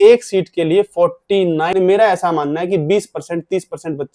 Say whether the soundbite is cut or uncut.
cut